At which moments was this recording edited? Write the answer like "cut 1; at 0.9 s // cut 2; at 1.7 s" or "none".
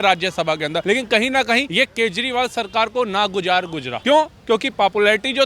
cut 1; at 0.8 s // cut 2; at 1.7 s // cut 3; at 3.9 s